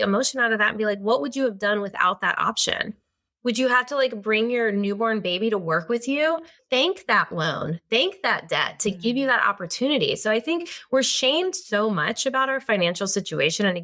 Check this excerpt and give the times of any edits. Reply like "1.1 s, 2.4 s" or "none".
none